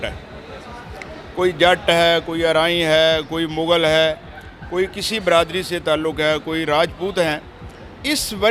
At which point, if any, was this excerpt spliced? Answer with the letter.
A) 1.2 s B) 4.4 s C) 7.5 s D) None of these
D